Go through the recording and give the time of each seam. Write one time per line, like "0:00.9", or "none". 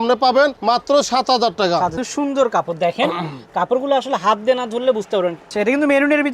0:02.0
0:05.5